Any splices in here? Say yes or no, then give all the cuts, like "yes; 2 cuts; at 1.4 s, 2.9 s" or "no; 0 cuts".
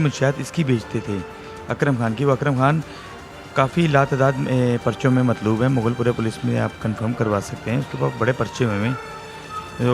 no; 0 cuts